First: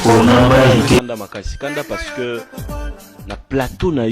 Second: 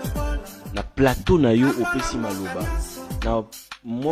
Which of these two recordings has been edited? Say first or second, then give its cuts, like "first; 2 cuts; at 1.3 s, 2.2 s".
first; 1 cut; at 1.1 s